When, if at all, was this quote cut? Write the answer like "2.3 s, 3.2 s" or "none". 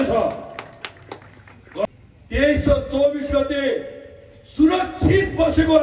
1.9 s